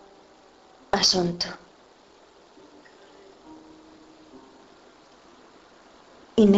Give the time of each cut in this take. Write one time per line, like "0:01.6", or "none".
none

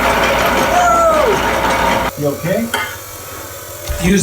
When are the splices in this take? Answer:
0:02.1

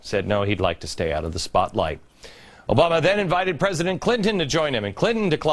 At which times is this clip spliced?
none

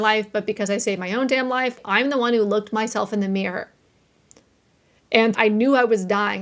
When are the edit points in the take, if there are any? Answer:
0:01.8
0:05.4

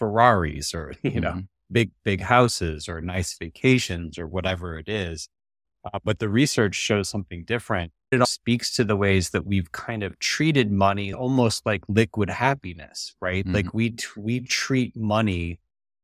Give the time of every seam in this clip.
0:08.2
0:11.2

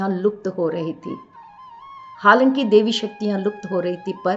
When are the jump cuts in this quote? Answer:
none

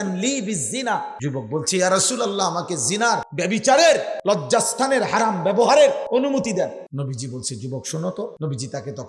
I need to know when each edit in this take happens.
0:01.1
0:03.3
0:04.1
0:06.0
0:06.8
0:08.3

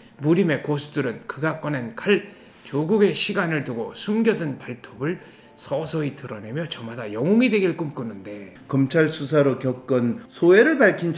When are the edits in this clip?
0:08.6
0:10.2

